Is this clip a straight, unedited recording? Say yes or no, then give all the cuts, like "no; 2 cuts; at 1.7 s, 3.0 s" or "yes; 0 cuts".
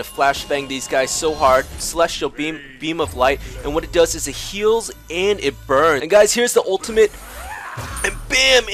no; 2 cuts; at 1.8 s, 6.0 s